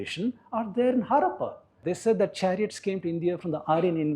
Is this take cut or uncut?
cut